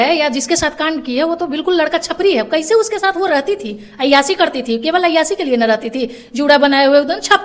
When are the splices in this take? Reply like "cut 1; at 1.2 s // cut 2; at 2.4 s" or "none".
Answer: none